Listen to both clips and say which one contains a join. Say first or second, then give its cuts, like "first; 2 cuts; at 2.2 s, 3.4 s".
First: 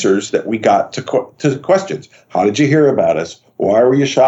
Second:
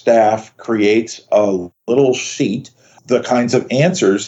second; 1 cut; at 3.0 s